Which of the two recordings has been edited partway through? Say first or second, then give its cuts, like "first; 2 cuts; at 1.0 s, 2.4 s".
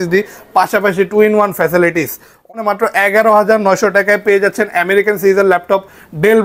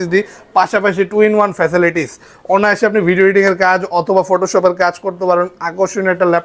first; 1 cut; at 2.5 s